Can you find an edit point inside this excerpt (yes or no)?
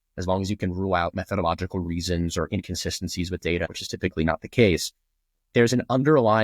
yes